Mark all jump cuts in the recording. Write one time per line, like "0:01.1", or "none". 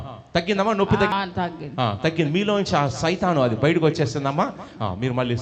0:01.1